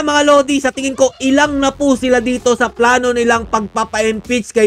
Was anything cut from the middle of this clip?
no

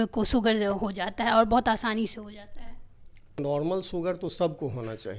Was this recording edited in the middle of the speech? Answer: yes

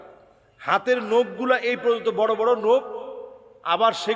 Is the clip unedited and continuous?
yes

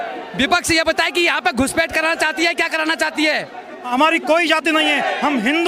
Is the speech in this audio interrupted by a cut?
yes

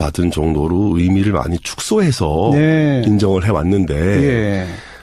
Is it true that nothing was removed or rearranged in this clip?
yes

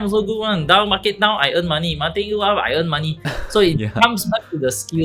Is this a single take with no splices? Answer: yes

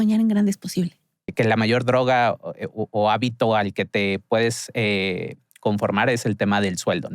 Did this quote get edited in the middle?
yes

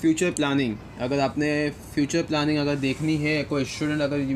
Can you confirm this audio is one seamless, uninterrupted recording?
yes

